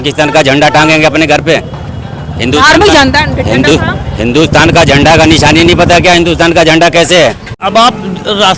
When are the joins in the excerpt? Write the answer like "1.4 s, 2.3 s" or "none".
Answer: 7.6 s